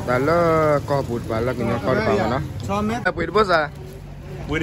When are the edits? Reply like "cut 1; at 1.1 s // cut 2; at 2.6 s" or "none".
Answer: cut 1; at 3.1 s